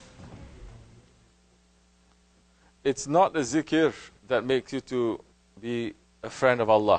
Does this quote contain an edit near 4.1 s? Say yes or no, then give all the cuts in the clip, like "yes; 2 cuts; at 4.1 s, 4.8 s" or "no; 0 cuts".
no; 1 cut; at 1.9 s